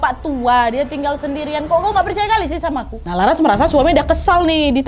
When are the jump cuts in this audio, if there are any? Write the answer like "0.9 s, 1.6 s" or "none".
none